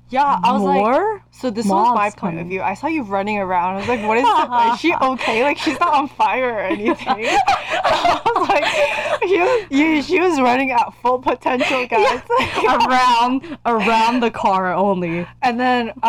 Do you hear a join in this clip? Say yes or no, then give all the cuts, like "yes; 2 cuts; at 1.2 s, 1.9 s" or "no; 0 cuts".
no; 0 cuts